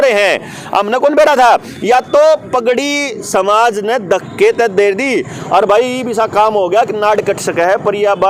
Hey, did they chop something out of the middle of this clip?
no; 0 cuts

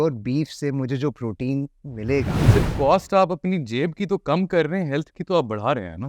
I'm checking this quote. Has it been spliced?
yes; 1 cut; at 2.4 s

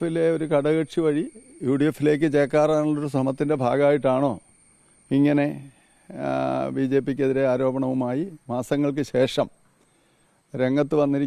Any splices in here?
no; 0 cuts

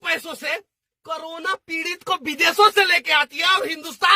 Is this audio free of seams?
yes; 0 cuts

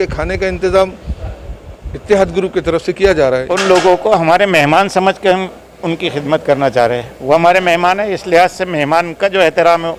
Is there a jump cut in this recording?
yes; 1 cut; at 3.5 s

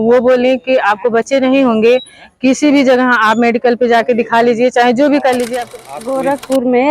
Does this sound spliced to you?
yes; 1 cut; at 5.6 s

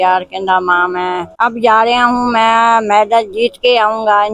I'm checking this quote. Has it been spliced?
yes; 1 cut; at 1.3 s

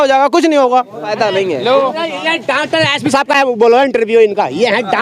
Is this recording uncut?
no; 1 cut; at 1.1 s

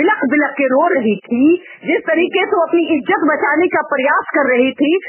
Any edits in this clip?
no; 0 cuts

